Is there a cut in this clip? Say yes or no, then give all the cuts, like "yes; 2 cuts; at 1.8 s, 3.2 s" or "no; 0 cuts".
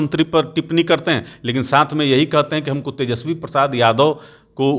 no; 0 cuts